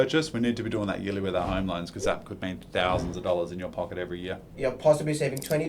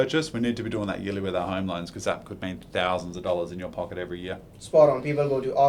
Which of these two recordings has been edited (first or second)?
first